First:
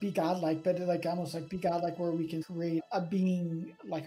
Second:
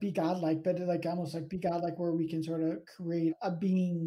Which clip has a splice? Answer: first; 1 cut; at 2.4 s

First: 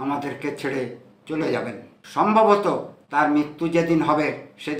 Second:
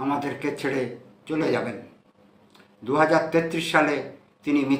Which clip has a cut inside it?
first; 1 cut; at 2.0 s

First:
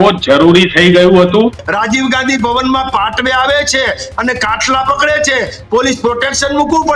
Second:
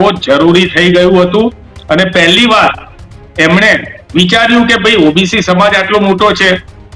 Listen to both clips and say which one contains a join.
first; 1 cut; at 1.7 s

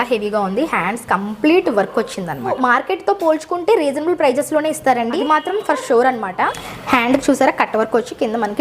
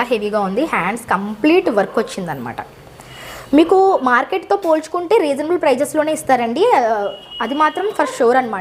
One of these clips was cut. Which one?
first; 3 cuts; at 2.5 s, 5.1 s, 6.7 s

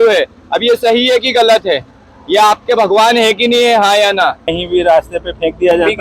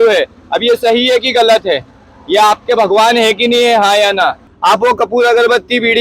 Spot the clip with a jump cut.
second; 1 cut; at 4.5 s

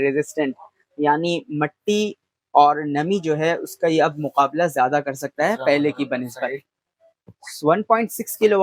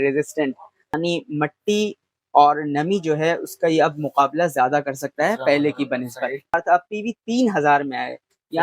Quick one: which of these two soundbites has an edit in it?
second; 2 cuts; at 1.0 s, 6.5 s

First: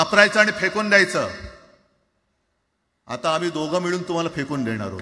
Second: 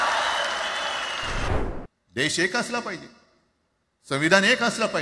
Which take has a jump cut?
second; 1 cut; at 1.4 s

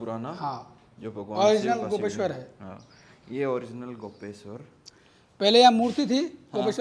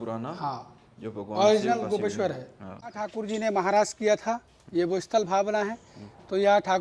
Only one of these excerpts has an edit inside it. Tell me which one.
second; 1 cut; at 3.1 s

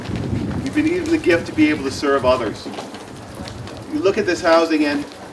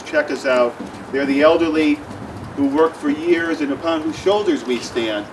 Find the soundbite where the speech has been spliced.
second; 1 cut; at 3.8 s

